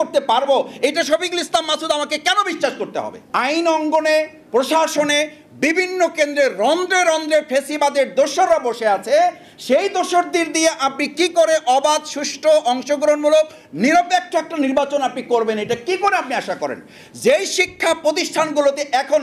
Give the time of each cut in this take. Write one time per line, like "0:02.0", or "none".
0:03.2